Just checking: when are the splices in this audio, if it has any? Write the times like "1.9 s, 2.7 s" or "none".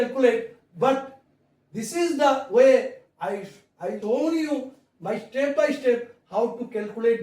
4.0 s